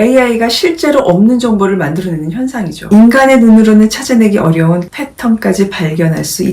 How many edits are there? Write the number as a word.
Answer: one